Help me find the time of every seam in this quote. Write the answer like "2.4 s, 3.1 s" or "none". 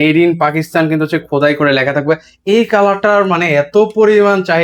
none